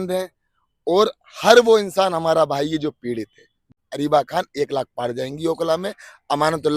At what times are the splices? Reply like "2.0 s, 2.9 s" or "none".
3.7 s